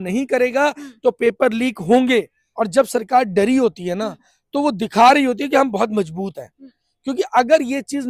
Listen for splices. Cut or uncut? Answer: cut